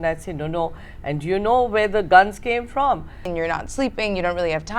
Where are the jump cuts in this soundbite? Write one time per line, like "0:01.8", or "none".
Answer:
0:03.3